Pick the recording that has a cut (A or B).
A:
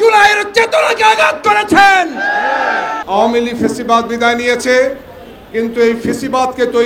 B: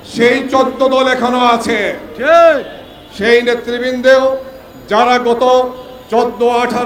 A